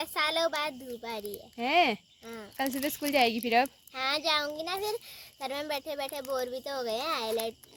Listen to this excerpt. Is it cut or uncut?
uncut